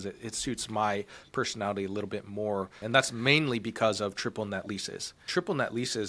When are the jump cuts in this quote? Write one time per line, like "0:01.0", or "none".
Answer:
0:02.8
0:05.2